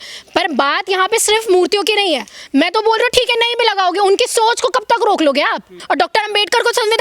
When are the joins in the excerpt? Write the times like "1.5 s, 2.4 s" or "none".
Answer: 5.8 s